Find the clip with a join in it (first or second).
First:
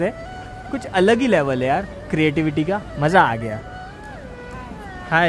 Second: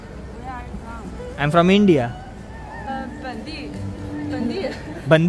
second